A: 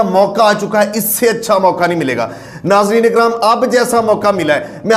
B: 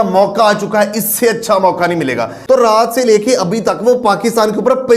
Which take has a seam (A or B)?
B